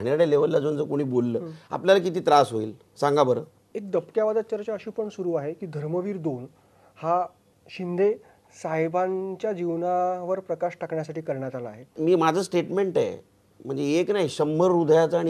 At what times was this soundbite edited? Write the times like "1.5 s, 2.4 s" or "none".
3.7 s, 11.9 s